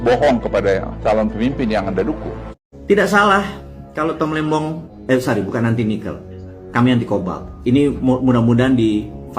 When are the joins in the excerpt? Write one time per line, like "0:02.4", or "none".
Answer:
0:02.4
0:04.9

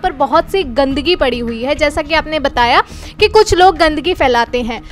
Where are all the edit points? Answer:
none

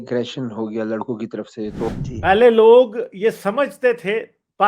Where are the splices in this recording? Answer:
0:01.9

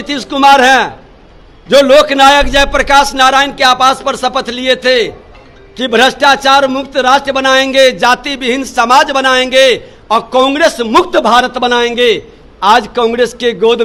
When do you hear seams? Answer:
none

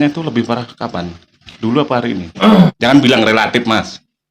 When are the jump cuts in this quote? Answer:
0:02.8

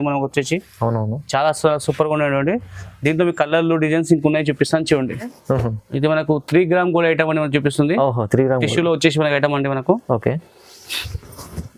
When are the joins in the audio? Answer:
0:05.3

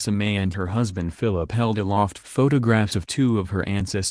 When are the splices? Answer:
none

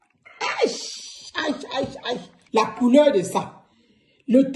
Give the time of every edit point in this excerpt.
0:02.3

